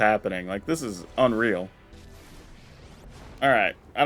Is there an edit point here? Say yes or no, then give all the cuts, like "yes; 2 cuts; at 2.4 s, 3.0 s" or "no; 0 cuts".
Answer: yes; 1 cut; at 1.9 s